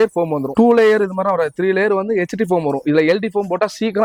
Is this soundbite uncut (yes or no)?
yes